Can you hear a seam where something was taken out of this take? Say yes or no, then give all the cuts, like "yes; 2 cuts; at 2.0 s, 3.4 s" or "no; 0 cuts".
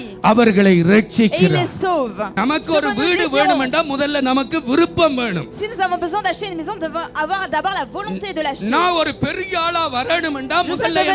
yes; 1 cut; at 2.2 s